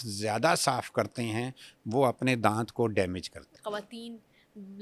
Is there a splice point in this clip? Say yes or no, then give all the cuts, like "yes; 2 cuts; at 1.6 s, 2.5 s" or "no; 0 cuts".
yes; 1 cut; at 3.5 s